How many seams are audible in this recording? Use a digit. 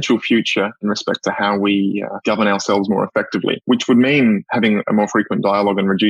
3